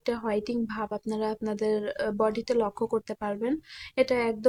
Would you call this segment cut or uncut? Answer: uncut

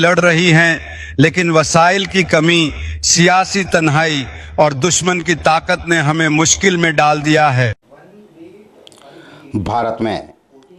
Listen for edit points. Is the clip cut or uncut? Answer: cut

